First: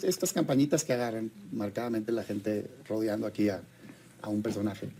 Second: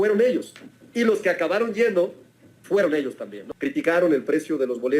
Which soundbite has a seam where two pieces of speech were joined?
second; 1 cut; at 3.5 s

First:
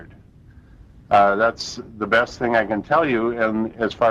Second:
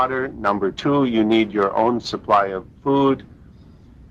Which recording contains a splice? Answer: first; 1 cut; at 1.5 s

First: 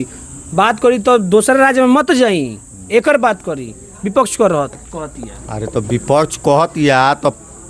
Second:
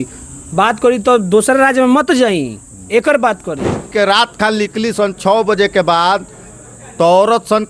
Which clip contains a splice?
second; 1 cut; at 3.9 s

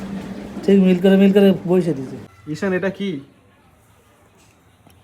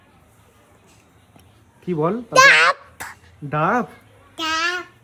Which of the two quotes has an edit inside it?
first; 1 cut; at 2.3 s

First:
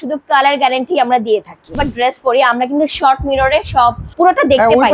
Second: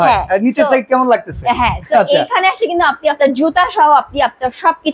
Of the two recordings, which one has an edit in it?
first; 2 cuts; at 1.8 s, 4.0 s

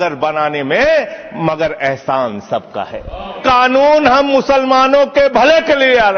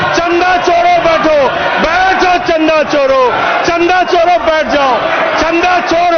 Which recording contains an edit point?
first; 1 cut; at 3.4 s

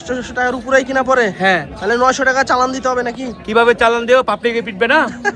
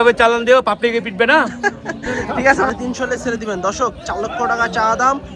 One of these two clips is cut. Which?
second; 1 cut; at 2.7 s

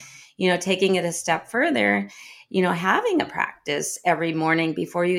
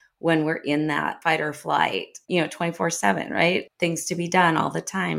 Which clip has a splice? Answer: second; 3 cuts; at 1.2 s, 2.2 s, 3.7 s

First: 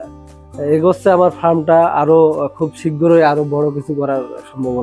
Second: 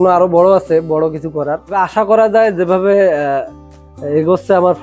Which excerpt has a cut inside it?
second; 1 cut; at 1.7 s

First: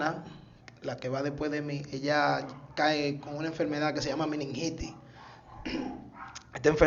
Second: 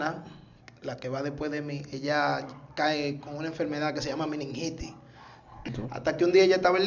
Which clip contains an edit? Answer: second; 1 cut; at 5.7 s

